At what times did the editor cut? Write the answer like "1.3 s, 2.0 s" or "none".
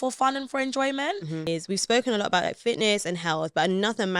1.5 s